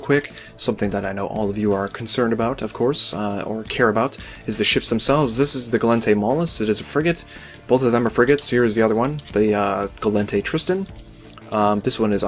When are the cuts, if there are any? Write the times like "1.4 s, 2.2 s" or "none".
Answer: 4.4 s